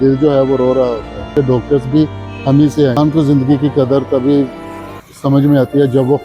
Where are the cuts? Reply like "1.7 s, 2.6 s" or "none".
1.3 s, 3.0 s